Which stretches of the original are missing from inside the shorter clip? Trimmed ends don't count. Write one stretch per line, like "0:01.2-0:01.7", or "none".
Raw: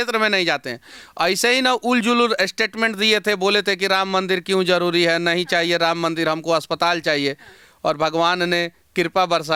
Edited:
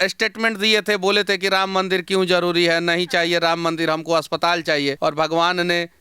0:07.3-0:07.8